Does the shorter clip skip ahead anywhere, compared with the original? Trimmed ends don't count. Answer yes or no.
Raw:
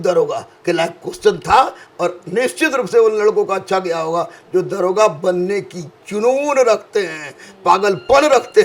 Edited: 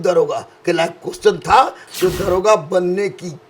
yes